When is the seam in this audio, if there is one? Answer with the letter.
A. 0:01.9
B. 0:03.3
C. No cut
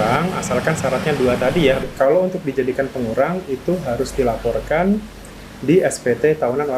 A